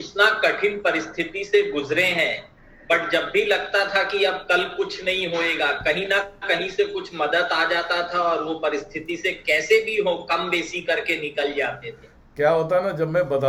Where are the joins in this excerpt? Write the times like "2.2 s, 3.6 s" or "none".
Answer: none